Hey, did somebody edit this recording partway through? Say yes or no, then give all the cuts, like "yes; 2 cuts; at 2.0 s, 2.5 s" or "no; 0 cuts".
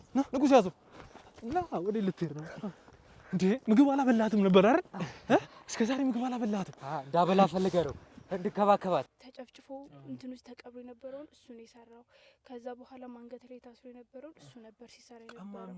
yes; 1 cut; at 9.0 s